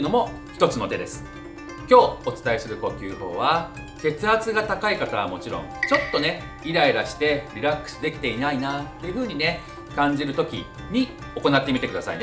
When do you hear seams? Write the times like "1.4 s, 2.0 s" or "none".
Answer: 5.7 s, 11.2 s